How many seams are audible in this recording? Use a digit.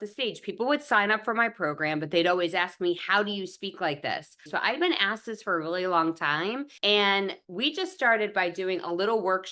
1